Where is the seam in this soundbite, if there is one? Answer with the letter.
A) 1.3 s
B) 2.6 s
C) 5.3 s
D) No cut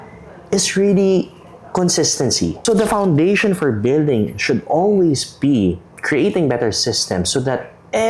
B